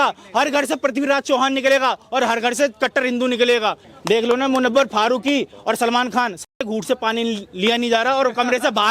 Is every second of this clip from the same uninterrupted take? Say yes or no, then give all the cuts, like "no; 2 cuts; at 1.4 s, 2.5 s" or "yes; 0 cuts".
no; 1 cut; at 3.9 s